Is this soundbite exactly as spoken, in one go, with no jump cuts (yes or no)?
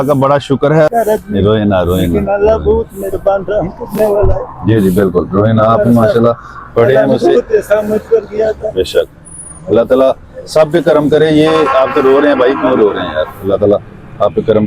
no